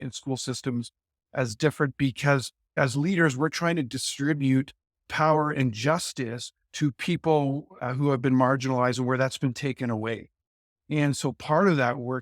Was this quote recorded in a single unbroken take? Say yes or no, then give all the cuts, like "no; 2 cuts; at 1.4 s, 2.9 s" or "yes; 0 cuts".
no; 1 cut; at 2.7 s